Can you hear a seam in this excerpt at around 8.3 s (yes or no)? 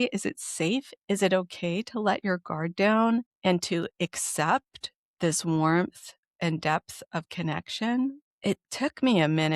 yes